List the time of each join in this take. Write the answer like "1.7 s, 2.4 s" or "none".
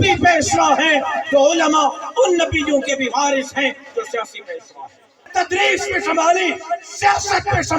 5.2 s